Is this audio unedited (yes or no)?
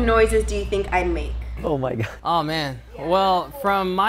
no